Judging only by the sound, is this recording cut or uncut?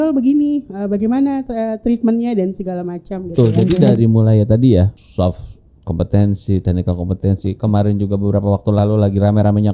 cut